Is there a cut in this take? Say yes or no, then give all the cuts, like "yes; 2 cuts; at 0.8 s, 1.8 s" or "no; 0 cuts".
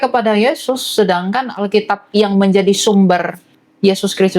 no; 0 cuts